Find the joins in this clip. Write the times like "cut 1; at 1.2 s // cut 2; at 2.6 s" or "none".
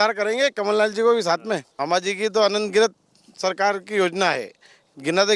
cut 1; at 1.7 s